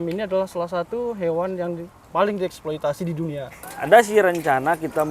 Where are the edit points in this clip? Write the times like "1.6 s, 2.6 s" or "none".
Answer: 3.5 s